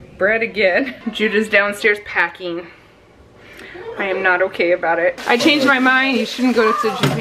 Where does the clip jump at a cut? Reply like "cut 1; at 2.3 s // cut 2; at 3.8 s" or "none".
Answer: cut 1; at 1.0 s // cut 2; at 5.2 s